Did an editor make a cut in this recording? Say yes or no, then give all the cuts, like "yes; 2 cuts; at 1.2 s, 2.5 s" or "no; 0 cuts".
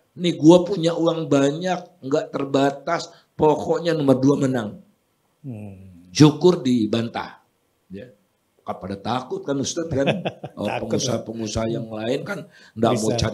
no; 0 cuts